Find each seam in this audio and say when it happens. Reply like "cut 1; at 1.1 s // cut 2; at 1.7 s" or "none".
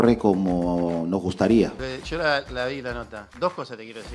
cut 1; at 1.8 s // cut 2; at 3.3 s